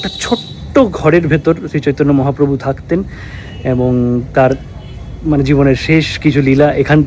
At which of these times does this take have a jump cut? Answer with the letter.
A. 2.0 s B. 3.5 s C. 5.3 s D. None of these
D